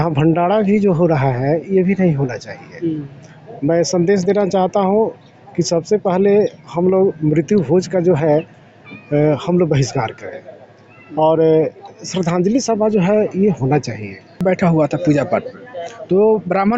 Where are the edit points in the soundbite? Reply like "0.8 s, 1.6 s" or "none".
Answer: 14.4 s